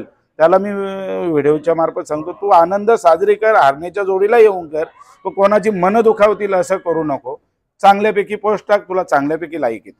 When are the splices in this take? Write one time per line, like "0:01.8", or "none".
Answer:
none

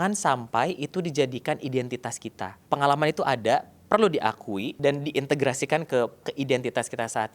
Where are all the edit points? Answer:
0:02.5
0:04.7
0:06.3

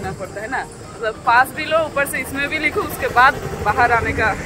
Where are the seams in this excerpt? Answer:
none

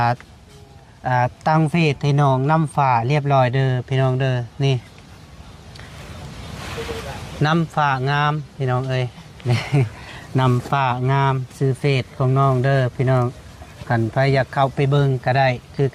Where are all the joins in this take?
none

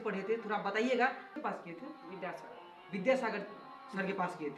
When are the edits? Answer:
0:01.3

